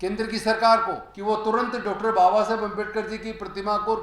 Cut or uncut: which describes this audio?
cut